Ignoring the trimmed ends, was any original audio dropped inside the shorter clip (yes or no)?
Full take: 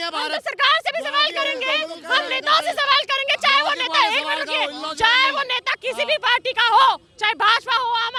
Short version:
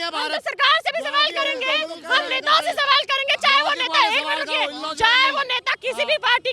no